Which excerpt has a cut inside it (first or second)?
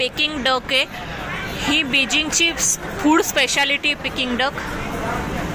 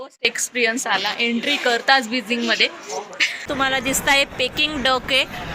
second